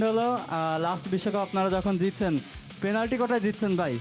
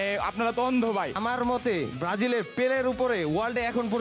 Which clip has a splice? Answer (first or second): second